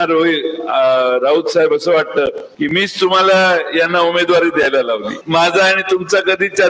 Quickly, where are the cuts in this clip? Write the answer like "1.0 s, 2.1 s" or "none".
2.5 s, 5.1 s